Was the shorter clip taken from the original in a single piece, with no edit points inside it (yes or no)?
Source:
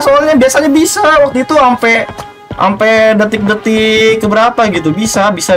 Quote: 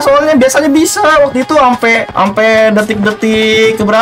no